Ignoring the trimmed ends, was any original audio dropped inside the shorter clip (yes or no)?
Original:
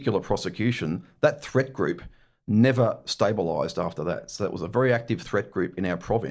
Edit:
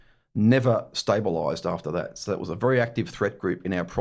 no